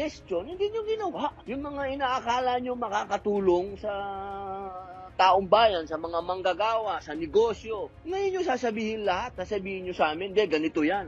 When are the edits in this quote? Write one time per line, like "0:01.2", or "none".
0:01.4
0:07.9